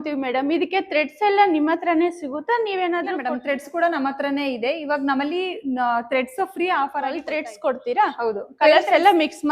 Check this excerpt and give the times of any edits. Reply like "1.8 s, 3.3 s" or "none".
3.2 s, 7.2 s